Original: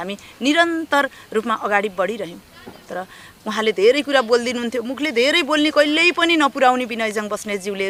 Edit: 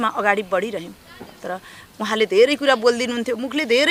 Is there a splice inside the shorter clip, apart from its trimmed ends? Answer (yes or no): no